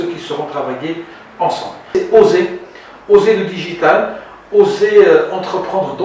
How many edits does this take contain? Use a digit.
1